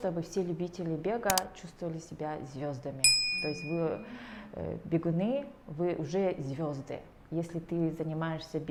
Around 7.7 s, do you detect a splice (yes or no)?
no